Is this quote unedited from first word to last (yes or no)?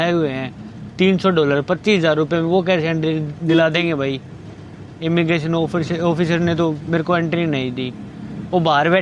yes